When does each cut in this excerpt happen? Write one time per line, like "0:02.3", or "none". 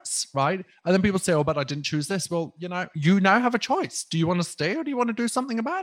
none